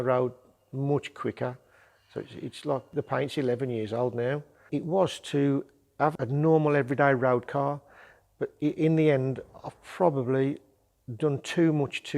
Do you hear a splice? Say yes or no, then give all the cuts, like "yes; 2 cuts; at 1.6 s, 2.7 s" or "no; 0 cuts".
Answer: yes; 3 cuts; at 2.9 s, 4.5 s, 6.2 s